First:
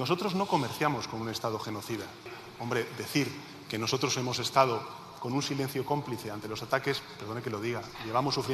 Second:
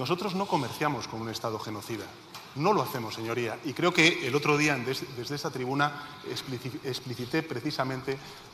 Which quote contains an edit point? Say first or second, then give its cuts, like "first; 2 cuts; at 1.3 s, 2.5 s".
first; 1 cut; at 2.4 s